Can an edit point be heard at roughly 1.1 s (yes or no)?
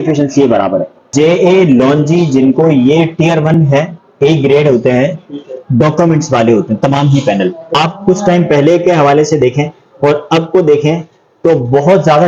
yes